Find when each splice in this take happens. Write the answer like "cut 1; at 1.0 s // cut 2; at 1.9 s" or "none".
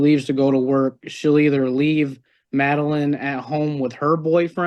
none